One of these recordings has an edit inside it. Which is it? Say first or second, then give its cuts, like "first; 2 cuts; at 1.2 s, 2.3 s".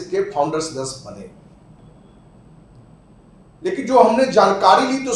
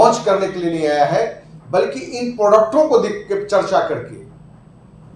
first; 1 cut; at 1.8 s